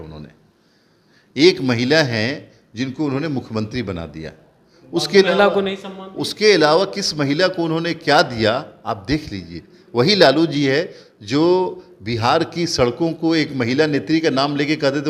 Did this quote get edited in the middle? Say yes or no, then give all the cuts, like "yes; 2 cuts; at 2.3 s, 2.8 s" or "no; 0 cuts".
no; 0 cuts